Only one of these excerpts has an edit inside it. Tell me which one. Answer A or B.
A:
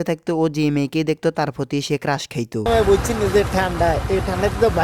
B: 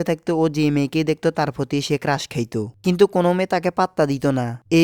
A